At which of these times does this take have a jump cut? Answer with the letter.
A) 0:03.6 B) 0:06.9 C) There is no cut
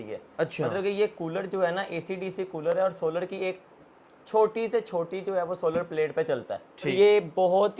B